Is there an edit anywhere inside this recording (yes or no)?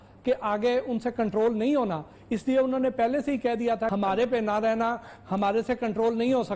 yes